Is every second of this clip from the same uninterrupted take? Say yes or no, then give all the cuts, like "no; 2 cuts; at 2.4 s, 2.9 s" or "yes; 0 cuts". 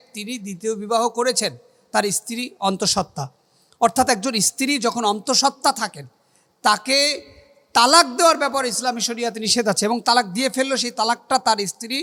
yes; 0 cuts